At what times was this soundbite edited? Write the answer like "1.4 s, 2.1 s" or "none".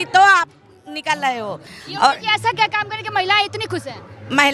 1.7 s